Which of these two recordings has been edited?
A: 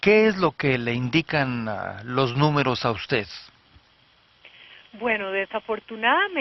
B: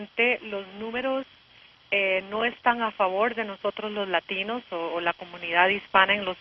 A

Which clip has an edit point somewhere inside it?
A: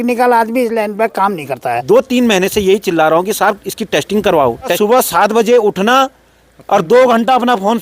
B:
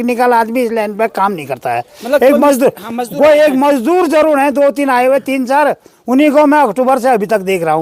A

